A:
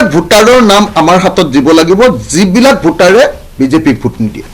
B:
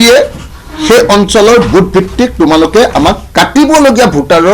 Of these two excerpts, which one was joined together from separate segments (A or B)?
B